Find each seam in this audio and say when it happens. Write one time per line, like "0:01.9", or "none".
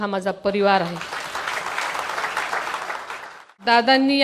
0:03.3